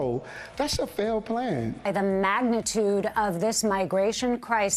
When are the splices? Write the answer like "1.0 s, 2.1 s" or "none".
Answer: 1.8 s